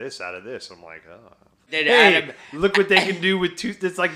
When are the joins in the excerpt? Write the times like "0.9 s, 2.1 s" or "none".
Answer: 1.7 s